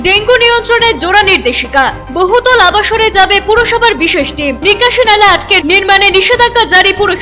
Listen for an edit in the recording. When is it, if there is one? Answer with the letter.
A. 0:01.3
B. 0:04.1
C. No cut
C